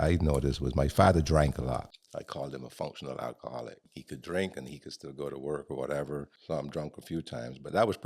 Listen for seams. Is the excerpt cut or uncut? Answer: cut